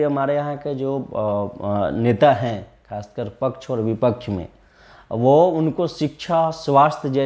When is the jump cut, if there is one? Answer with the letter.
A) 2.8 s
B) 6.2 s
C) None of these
C